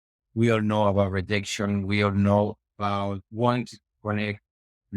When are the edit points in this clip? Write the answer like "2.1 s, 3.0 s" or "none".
3.2 s